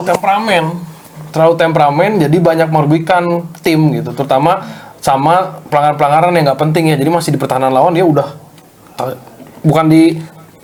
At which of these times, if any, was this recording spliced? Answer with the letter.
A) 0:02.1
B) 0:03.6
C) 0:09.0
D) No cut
D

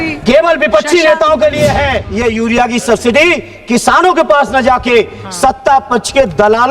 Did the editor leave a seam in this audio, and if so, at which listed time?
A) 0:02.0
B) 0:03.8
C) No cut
A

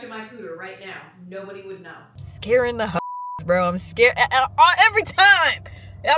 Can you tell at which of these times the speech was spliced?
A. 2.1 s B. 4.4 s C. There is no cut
A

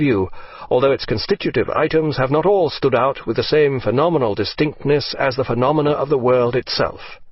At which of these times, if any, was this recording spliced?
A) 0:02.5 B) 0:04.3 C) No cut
A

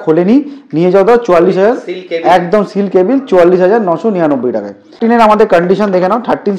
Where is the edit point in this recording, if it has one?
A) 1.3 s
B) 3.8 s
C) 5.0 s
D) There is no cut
C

